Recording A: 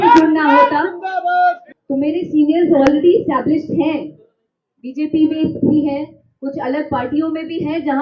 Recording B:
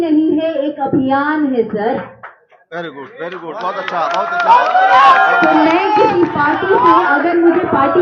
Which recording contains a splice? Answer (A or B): A